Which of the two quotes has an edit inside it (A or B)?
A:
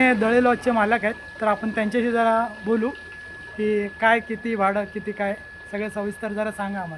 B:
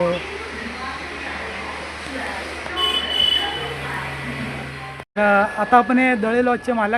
B